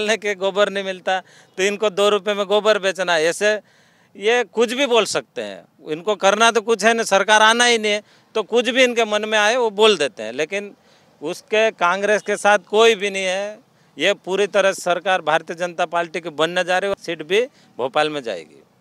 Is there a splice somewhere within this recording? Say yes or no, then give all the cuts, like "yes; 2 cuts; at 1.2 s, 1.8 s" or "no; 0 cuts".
no; 0 cuts